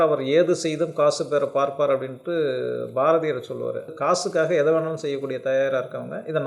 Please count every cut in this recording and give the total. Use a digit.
1